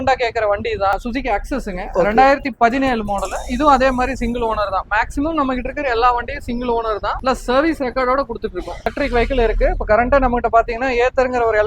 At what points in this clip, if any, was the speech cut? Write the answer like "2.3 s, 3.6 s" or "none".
1.0 s, 8.9 s